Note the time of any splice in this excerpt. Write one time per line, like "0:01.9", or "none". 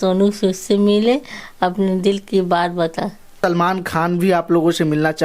0:03.3